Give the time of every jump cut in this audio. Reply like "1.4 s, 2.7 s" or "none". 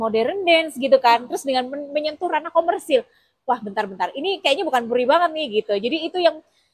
none